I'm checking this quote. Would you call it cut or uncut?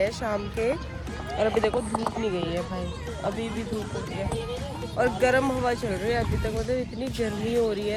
uncut